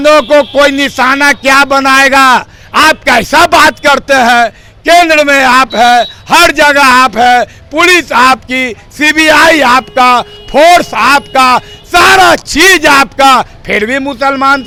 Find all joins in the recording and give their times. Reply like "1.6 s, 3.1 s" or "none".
none